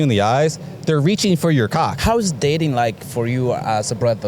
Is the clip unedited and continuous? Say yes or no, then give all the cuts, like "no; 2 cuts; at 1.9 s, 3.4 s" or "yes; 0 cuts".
no; 1 cut; at 2.0 s